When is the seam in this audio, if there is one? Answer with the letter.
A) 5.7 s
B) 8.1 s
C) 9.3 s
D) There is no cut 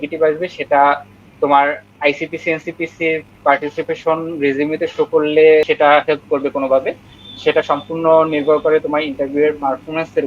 A